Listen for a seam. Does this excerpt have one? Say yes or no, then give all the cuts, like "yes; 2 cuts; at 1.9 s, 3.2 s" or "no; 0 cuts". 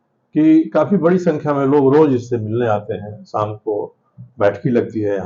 no; 0 cuts